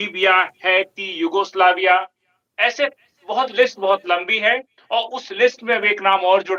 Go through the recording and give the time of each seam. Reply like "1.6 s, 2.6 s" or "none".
none